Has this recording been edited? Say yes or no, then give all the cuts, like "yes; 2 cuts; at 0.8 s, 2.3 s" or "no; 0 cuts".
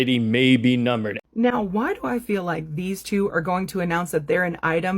yes; 1 cut; at 1.2 s